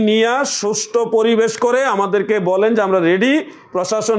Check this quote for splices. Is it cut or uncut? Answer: uncut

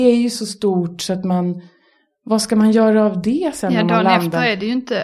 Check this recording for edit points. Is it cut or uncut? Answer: uncut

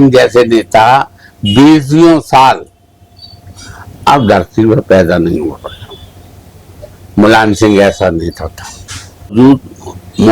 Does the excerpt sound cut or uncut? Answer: cut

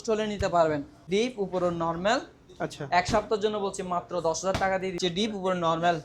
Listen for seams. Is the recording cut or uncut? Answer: cut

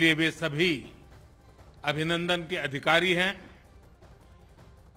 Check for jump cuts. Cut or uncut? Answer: cut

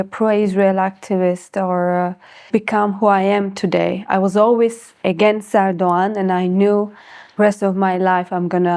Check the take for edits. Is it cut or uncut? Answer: uncut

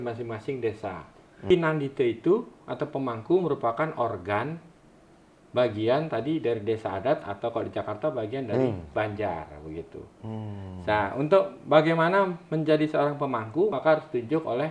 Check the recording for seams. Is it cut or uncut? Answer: cut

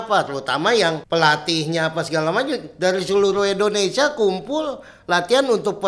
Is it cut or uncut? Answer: cut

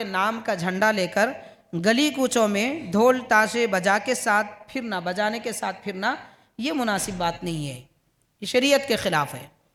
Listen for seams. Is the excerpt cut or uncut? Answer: uncut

